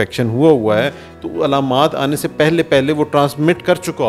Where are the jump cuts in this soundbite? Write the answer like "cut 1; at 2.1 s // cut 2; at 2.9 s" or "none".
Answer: none